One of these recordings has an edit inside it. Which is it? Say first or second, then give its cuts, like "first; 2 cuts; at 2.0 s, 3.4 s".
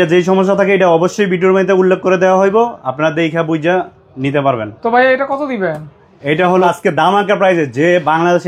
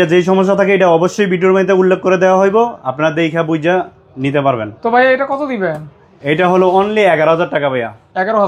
first; 1 cut; at 6.6 s